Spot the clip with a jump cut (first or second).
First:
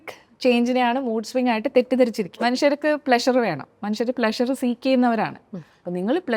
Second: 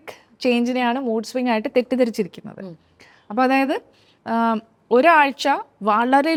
first